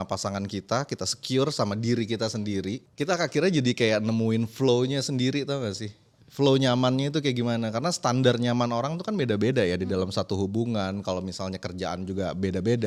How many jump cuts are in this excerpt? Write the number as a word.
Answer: zero